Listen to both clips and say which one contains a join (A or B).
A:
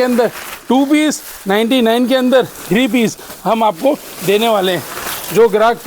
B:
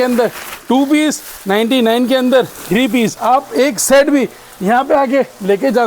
B